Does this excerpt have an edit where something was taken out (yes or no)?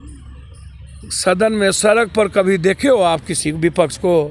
no